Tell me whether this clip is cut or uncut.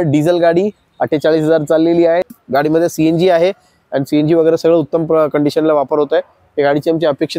cut